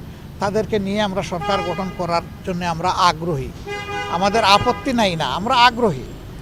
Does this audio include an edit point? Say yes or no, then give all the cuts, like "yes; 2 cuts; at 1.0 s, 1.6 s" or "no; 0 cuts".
no; 0 cuts